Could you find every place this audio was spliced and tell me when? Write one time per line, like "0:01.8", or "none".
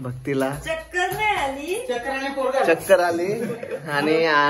none